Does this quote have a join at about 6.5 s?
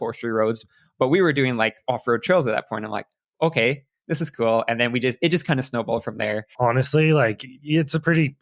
yes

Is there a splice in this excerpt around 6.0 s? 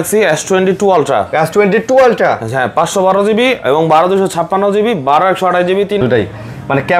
yes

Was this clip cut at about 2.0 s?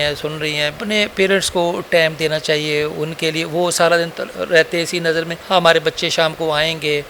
no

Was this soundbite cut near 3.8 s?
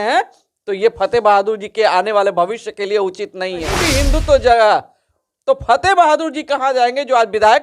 yes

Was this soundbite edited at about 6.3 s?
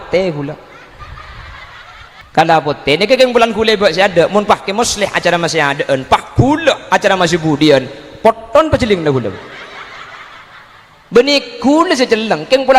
no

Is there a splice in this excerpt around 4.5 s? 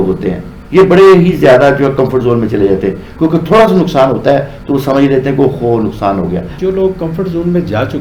no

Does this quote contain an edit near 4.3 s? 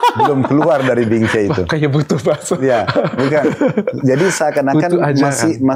no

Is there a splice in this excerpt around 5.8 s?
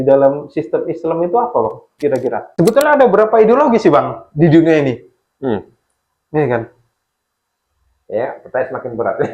no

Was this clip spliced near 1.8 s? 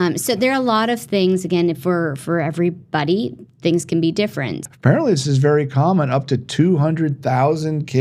no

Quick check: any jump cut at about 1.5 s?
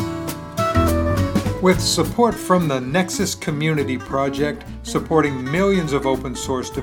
yes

